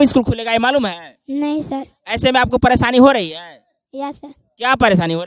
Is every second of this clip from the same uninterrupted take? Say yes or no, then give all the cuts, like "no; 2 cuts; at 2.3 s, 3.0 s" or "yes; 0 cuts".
yes; 0 cuts